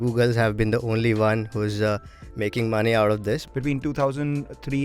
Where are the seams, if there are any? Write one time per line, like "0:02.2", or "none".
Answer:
0:03.4